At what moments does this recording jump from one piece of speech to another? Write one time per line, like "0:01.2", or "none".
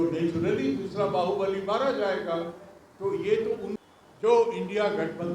0:03.6